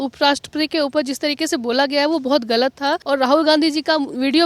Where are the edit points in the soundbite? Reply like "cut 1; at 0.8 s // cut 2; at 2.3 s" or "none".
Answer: cut 1; at 3.0 s